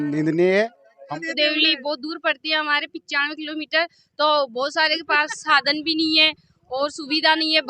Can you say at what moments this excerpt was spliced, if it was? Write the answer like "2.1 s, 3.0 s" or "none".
1.0 s